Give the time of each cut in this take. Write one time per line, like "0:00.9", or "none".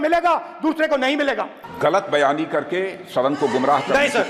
0:01.6